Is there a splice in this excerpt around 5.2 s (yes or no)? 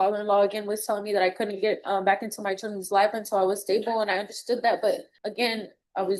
yes